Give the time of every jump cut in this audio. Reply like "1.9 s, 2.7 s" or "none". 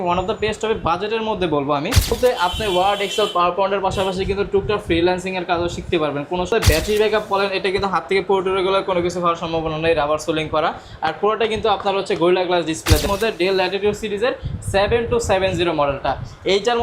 2.2 s, 6.5 s, 13.0 s